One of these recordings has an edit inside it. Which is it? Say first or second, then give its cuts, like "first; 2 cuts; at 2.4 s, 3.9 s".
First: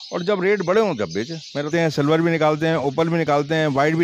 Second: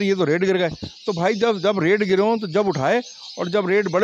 first; 1 cut; at 1.7 s